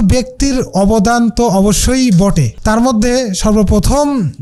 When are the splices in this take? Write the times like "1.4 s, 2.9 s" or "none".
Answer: 2.5 s